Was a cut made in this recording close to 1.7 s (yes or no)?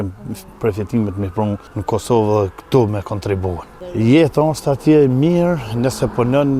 yes